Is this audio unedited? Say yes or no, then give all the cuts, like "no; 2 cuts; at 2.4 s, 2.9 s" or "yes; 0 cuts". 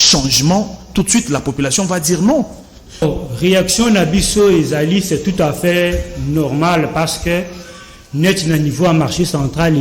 no; 1 cut; at 3.0 s